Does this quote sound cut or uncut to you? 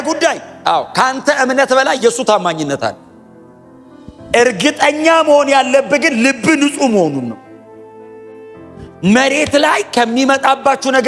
cut